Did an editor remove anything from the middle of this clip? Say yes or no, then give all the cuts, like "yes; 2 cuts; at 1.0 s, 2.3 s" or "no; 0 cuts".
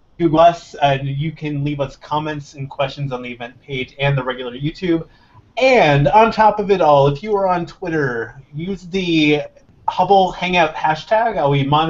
yes; 1 cut; at 8.1 s